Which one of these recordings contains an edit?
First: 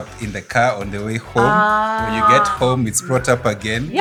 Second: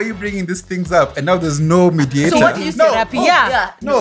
second; 1 cut; at 2.3 s

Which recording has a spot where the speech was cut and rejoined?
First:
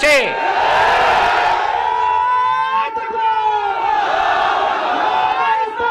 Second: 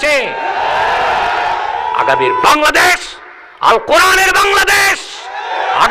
second; 1 cut; at 2.2 s

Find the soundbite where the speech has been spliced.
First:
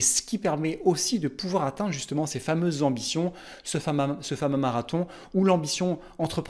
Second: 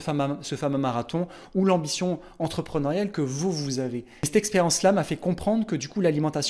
second; 1 cut; at 4.3 s

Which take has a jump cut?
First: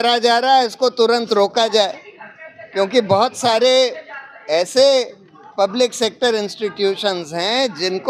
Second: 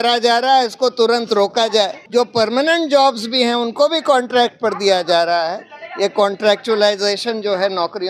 second; 1 cut; at 2.0 s

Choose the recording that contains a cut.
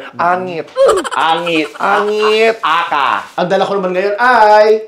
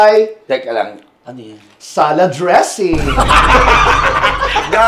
first; 1 cut; at 3.2 s

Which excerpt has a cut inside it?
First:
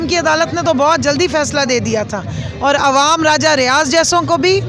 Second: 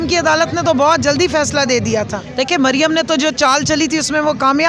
second; 1 cut; at 2.2 s

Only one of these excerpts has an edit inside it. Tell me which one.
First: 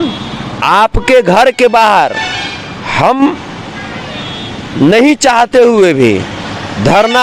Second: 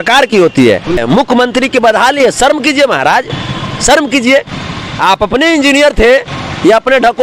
second; 1 cut; at 1.0 s

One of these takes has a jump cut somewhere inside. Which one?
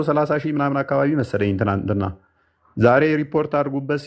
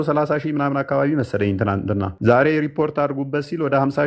second; 1 cut; at 2.1 s

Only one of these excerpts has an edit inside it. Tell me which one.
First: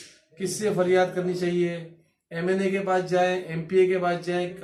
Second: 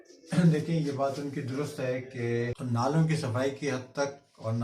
second; 1 cut; at 2.6 s

